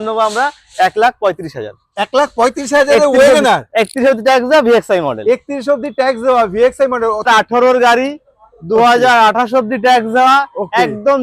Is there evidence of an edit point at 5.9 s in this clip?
no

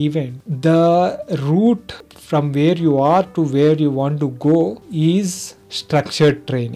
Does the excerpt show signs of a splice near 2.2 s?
no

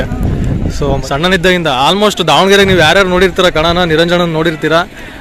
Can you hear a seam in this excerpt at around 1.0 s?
yes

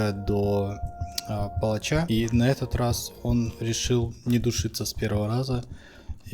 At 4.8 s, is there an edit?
no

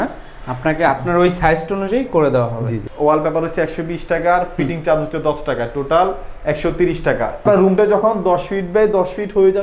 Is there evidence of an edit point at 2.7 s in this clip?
yes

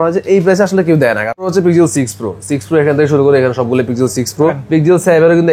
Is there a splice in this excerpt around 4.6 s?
yes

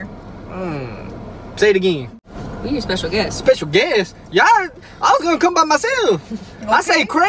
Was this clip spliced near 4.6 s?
no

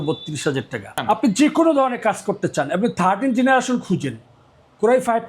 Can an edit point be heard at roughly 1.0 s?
yes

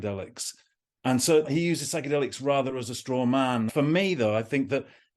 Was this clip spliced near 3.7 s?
yes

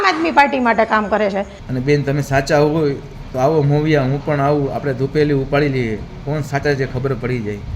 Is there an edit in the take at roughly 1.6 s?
yes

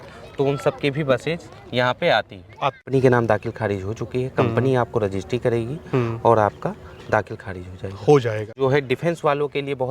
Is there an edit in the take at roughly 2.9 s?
yes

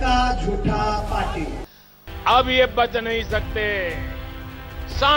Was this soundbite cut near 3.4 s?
no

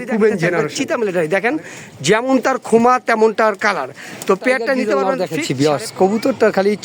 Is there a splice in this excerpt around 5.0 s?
yes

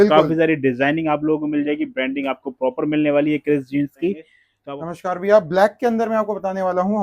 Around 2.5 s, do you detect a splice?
no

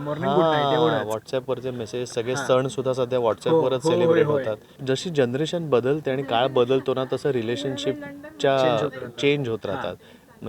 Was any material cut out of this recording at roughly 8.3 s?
no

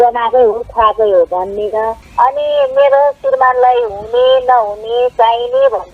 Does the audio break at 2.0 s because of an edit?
yes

